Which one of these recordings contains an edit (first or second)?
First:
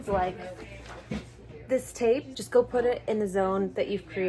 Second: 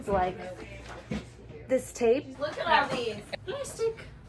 second